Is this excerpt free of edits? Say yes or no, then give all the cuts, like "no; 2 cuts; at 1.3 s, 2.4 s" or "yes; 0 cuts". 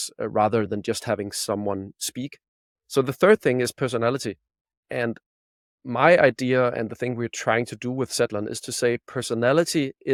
yes; 0 cuts